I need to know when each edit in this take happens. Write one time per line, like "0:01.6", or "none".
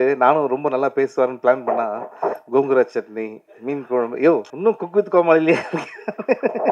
0:04.5